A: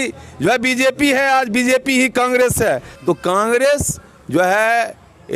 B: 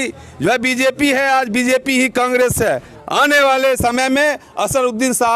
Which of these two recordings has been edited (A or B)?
B